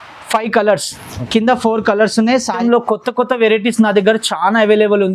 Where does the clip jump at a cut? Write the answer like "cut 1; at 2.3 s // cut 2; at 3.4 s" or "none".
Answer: cut 1; at 2.6 s